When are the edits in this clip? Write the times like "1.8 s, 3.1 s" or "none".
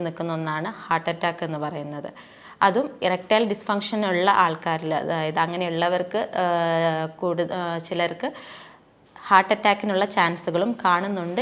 none